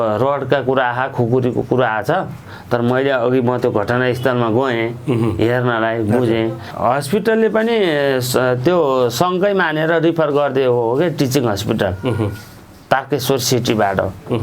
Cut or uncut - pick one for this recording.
cut